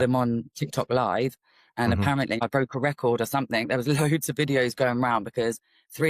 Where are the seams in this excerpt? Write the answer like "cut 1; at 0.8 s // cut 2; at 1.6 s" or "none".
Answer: cut 1; at 2.4 s